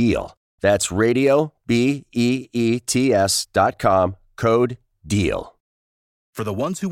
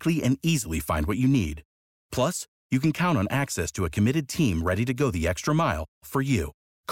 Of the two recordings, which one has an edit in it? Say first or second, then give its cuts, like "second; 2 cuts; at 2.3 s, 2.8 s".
first; 1 cut; at 5.6 s